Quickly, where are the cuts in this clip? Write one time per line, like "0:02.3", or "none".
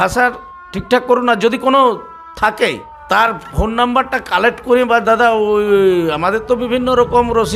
0:02.9